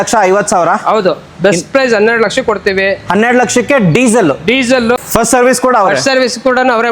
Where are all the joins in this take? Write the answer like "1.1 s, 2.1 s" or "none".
5.0 s